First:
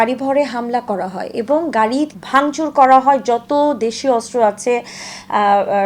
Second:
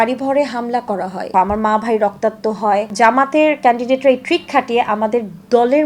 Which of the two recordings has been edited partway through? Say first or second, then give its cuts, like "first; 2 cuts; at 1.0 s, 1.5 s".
second; 2 cuts; at 1.3 s, 2.9 s